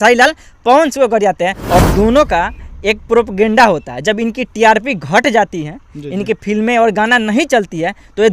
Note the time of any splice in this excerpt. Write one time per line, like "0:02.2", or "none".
0:01.8